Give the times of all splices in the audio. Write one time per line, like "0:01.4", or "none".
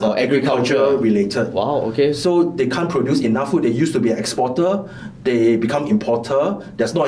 none

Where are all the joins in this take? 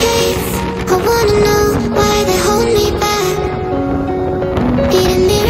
none

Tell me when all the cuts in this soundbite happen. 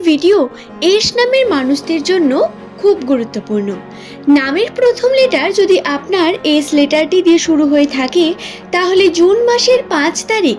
none

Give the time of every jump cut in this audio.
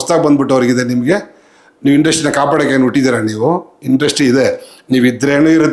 none

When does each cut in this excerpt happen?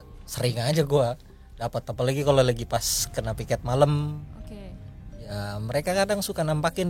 none

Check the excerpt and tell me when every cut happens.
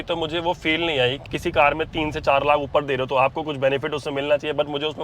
0:01.3

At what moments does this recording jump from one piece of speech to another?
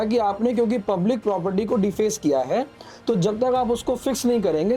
none

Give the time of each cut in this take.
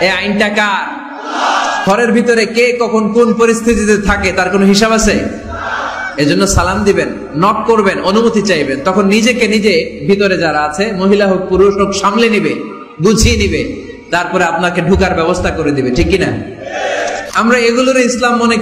0:01.8
0:17.3

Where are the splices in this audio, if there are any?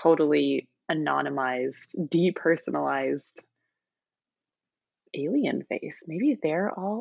none

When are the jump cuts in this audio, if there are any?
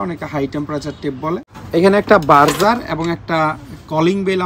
0:01.6

